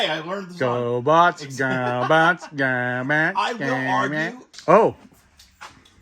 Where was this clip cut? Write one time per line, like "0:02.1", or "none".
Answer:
0:04.5